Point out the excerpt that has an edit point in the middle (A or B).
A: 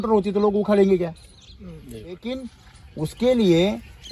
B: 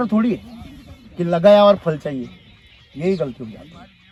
A